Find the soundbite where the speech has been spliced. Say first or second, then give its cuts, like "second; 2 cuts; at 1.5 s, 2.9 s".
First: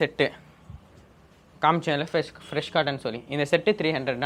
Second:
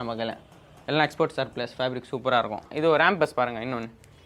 second; 1 cut; at 2.7 s